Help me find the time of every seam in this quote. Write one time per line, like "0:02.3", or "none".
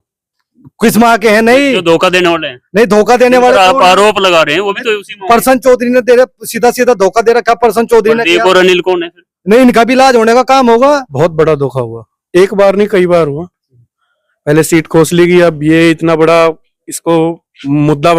0:11.1